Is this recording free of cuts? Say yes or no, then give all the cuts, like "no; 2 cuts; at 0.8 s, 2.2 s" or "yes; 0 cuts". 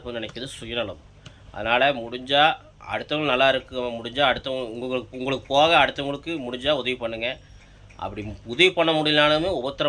yes; 0 cuts